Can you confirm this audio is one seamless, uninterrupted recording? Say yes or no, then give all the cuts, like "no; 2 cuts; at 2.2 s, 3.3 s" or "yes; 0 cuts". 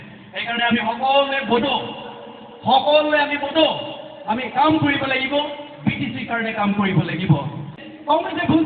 no; 1 cut; at 7.6 s